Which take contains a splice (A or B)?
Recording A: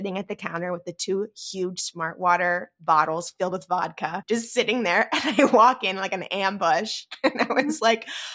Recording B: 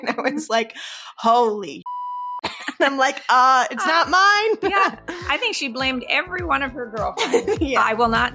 A